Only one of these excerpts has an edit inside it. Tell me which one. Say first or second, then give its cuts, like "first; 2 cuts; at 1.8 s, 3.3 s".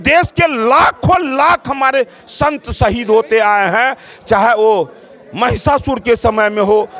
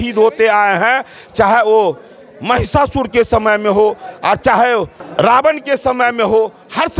second; 1 cut; at 5.0 s